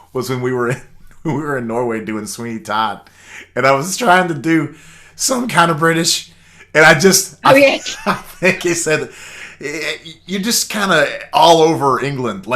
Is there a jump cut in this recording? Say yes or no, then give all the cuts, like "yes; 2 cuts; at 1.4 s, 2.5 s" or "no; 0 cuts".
no; 0 cuts